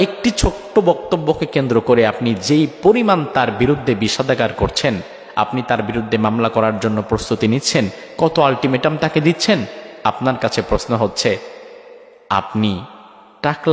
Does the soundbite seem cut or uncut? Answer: uncut